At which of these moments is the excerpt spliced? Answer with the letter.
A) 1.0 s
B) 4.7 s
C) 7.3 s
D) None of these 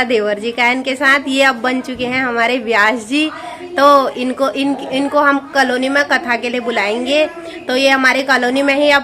D